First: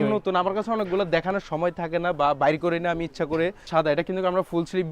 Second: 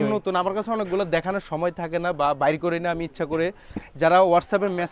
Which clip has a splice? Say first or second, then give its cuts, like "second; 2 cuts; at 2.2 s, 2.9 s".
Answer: first; 1 cut; at 3.7 s